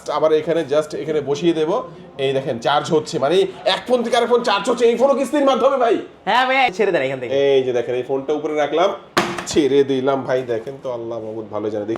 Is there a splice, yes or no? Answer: yes